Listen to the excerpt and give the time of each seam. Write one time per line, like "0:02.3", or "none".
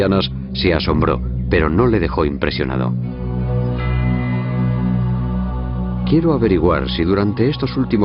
0:05.9